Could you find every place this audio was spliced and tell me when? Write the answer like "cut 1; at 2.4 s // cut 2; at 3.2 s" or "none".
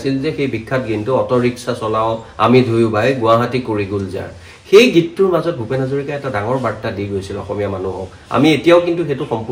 none

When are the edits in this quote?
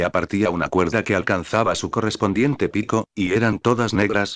cut 1; at 2.7 s

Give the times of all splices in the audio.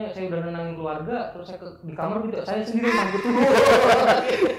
none

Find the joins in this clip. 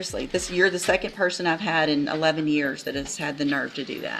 none

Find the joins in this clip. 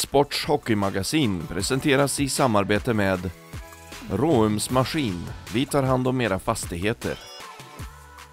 none

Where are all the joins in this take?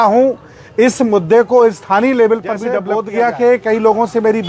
cut 1; at 2.8 s

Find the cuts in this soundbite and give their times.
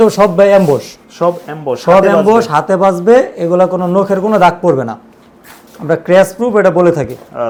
none

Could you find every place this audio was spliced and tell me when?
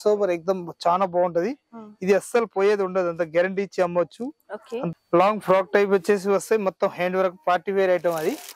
cut 1; at 4.9 s

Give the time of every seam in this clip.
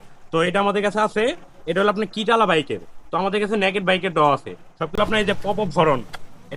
cut 1; at 4.9 s

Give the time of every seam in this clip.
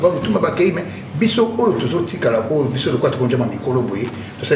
none

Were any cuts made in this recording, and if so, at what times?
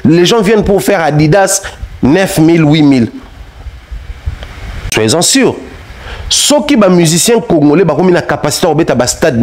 cut 1; at 4.9 s

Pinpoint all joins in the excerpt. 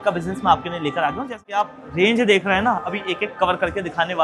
cut 1; at 1.4 s

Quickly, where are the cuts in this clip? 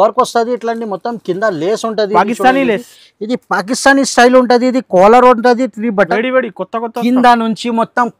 cut 1; at 6.1 s

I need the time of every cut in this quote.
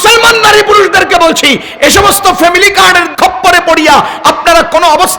cut 1; at 3.1 s

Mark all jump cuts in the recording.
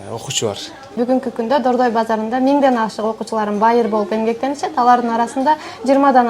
cut 1; at 1.0 s

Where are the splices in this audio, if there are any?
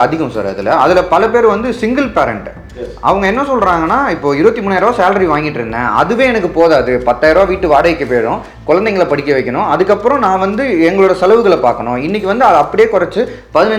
none

